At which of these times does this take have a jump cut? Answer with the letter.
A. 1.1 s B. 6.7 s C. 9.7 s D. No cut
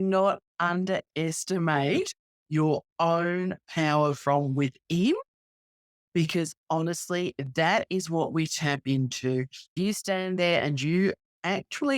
C